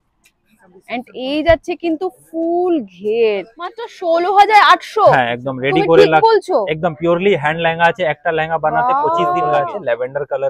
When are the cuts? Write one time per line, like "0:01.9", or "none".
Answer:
0:03.9
0:09.6